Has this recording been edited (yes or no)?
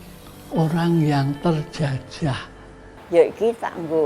yes